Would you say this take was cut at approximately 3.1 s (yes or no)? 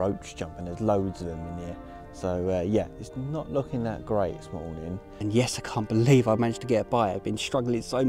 no